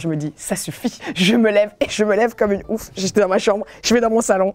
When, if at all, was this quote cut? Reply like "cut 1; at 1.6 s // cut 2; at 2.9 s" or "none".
none